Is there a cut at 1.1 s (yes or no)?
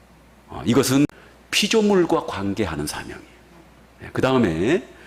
yes